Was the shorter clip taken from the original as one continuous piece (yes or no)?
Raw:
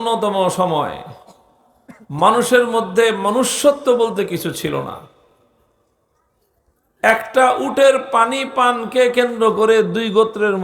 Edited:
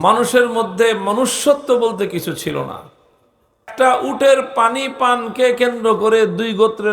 no